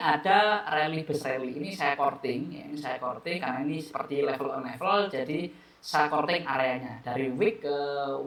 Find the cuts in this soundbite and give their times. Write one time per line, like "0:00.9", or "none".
none